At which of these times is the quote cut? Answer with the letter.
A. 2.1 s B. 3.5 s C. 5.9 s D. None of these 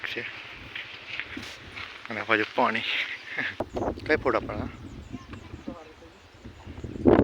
B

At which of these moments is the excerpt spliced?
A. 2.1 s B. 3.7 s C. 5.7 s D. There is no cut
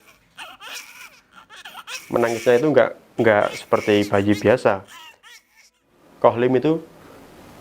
C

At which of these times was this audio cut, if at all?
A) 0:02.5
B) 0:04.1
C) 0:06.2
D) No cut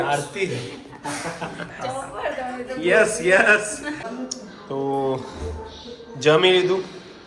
B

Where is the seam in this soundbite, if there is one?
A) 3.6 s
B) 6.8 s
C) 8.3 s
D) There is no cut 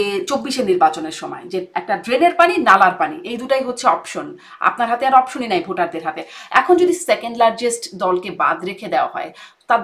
D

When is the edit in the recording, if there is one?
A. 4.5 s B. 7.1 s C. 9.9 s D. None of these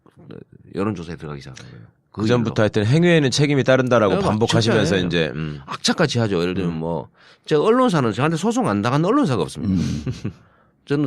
C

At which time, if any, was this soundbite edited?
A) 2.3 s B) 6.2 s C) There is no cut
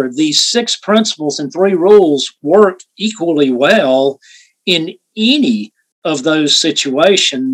C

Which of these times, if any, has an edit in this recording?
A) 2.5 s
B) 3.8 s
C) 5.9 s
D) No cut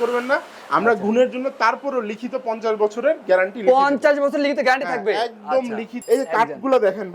C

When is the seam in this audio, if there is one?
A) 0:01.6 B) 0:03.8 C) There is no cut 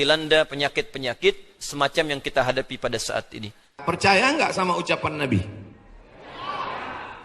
B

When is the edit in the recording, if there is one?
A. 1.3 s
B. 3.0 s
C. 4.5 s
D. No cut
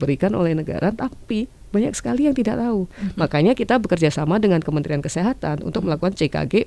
B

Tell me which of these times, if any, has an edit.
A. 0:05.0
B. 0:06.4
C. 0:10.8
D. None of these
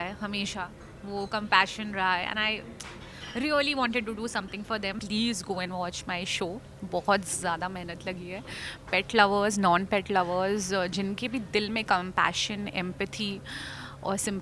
A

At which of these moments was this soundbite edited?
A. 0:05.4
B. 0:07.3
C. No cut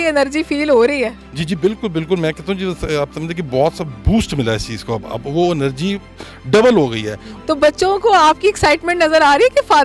B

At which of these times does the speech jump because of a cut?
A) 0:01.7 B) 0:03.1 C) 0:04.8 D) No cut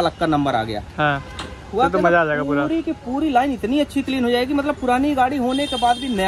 D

